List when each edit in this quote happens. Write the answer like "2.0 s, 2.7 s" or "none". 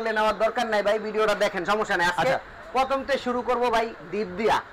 none